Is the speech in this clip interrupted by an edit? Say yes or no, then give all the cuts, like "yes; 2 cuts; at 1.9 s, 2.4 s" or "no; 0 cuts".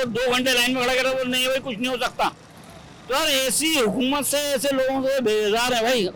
no; 0 cuts